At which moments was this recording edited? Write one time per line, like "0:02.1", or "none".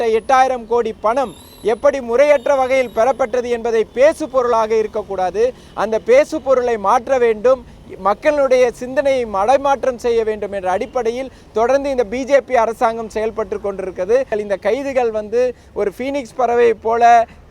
0:14.3

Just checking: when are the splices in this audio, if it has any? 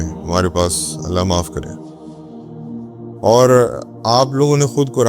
0:01.8
0:03.2

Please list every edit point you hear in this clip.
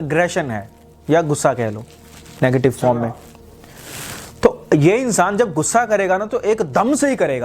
none

